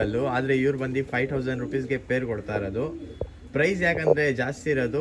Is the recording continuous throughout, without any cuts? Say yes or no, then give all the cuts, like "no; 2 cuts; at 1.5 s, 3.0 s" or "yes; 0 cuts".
yes; 0 cuts